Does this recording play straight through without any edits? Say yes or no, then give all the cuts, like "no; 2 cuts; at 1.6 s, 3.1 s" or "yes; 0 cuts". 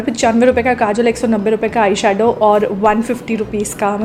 yes; 0 cuts